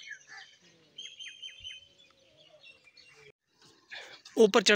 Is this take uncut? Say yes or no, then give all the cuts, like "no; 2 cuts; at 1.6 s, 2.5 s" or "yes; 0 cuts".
no; 1 cut; at 3.3 s